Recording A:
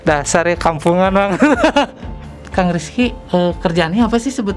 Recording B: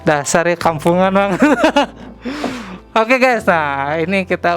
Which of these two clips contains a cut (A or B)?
A